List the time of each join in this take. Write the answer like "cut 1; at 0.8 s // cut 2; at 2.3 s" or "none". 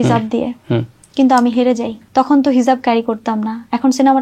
cut 1; at 1.0 s // cut 2; at 2.0 s